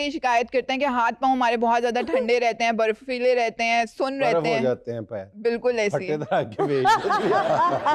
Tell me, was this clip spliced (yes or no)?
no